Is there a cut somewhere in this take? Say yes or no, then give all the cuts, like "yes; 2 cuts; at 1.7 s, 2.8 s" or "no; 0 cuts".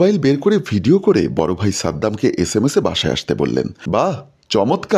yes; 1 cut; at 3.8 s